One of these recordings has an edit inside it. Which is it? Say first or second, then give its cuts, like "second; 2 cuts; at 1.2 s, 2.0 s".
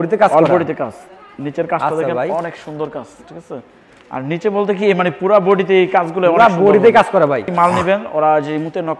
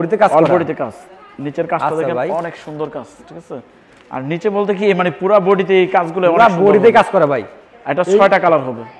first; 1 cut; at 7.5 s